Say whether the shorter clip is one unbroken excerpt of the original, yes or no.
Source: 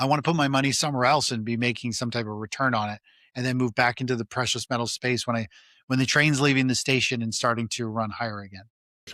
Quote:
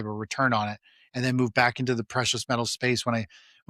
yes